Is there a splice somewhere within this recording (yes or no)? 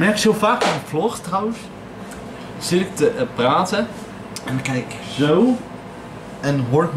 no